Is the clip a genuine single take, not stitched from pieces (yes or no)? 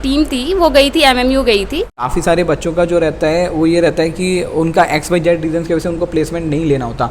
no